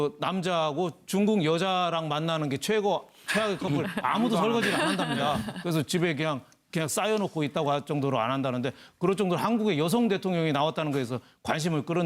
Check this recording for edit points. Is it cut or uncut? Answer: cut